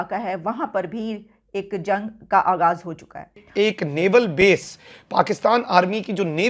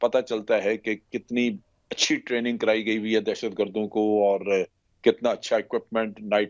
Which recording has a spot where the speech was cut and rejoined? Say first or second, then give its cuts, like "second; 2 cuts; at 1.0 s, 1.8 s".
first; 1 cut; at 3.4 s